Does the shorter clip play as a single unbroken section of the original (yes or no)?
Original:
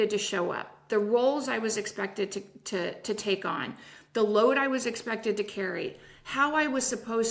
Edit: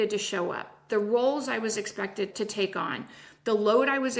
no